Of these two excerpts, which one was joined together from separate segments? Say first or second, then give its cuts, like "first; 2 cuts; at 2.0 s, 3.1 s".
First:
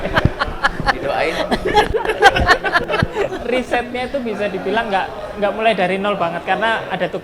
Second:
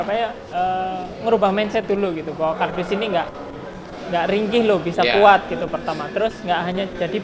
first; 1 cut; at 3.3 s